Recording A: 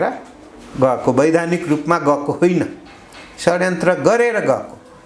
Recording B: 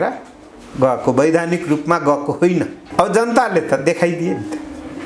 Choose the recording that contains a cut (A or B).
B